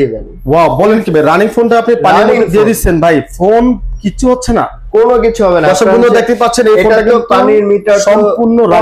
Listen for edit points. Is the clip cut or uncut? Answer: uncut